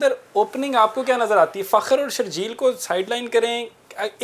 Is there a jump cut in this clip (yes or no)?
no